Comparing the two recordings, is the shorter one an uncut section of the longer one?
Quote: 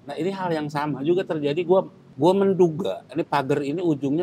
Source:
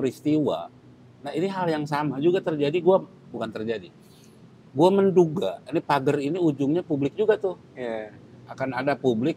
no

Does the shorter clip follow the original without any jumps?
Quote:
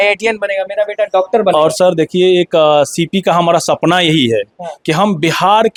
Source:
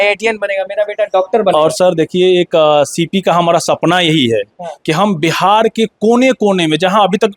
yes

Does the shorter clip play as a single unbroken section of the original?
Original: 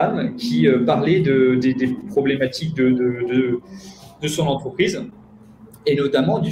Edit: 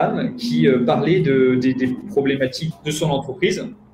no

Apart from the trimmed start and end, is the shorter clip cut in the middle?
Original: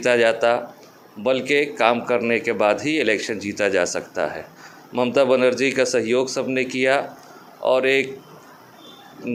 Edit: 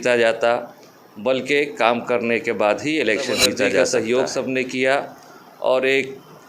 yes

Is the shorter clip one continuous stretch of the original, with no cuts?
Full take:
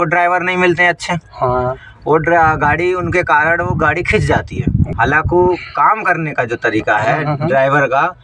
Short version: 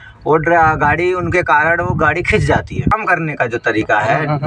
no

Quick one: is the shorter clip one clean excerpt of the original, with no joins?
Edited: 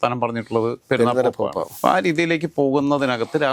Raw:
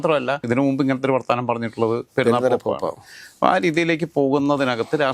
no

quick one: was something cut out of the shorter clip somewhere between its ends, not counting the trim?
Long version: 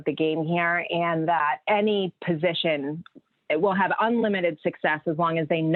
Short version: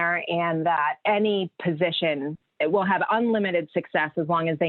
yes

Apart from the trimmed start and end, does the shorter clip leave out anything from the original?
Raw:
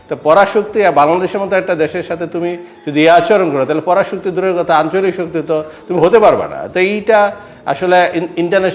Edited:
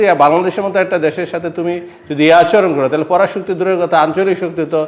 no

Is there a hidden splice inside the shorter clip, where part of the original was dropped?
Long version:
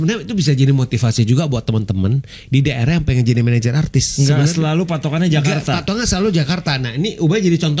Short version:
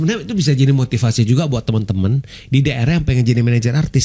no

